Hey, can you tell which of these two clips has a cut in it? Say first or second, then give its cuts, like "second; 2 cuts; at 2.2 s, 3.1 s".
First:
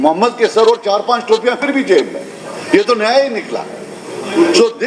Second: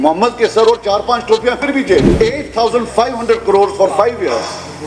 second; 1 cut; at 2.1 s